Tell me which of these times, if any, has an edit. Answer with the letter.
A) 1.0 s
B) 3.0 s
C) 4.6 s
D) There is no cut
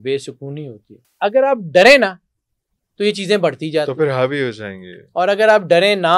A